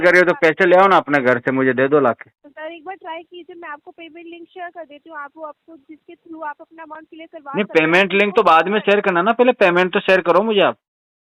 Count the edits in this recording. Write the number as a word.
one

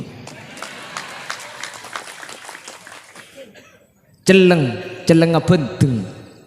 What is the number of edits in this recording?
one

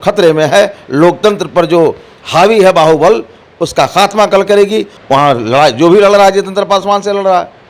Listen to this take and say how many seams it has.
one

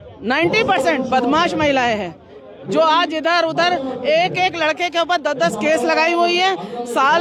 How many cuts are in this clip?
zero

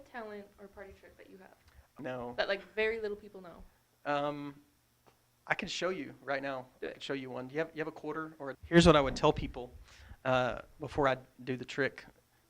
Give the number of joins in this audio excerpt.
two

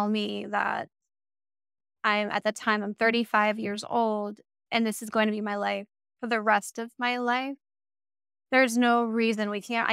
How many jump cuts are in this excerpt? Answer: zero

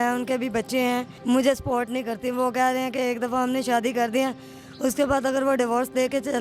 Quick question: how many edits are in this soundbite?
one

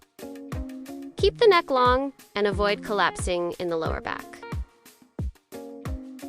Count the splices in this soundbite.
two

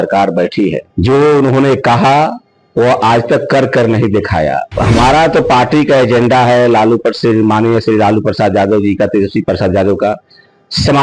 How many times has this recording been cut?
two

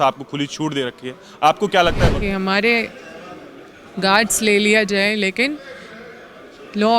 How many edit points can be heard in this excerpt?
one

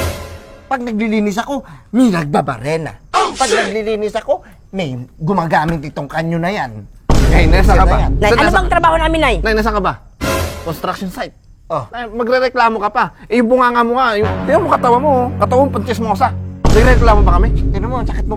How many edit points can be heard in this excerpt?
zero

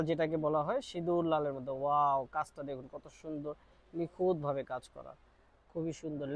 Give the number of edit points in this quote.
zero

